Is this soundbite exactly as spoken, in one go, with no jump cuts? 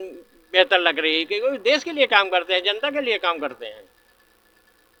yes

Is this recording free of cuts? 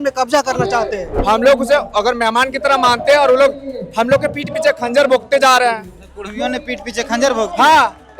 no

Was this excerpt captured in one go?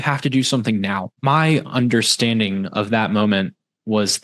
no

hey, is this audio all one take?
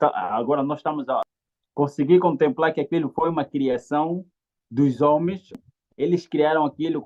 no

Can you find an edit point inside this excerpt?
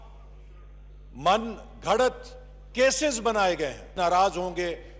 yes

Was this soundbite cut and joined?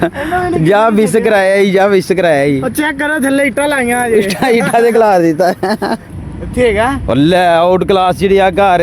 yes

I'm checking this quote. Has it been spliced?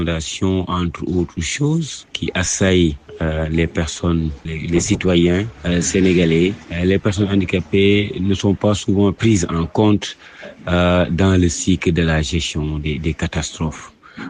no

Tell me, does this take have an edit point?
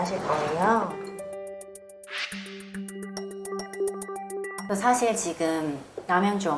yes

